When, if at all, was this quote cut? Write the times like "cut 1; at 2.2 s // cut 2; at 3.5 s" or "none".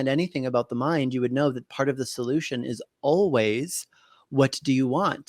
none